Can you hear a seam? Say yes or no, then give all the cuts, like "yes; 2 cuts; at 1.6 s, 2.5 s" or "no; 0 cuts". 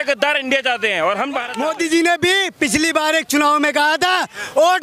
yes; 1 cut; at 1.5 s